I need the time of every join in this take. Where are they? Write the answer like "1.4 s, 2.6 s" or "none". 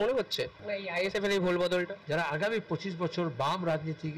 1.1 s, 2.0 s

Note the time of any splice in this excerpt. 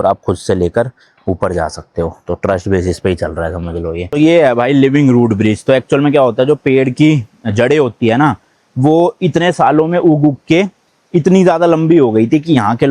4.1 s

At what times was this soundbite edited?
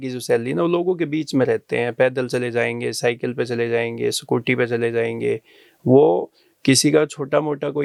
none

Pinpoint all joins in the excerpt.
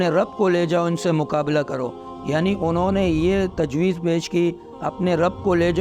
none

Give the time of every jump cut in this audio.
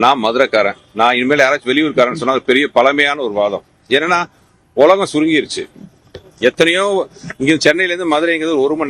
none

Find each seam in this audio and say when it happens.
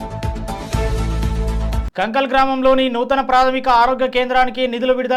none

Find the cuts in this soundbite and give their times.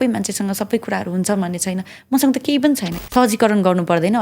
2.9 s

